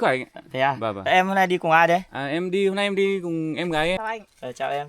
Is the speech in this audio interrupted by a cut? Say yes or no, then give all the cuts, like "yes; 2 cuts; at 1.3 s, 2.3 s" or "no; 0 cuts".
yes; 1 cut; at 4.0 s